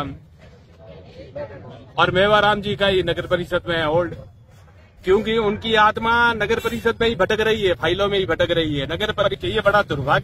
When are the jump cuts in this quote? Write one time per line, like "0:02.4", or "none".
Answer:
0:09.3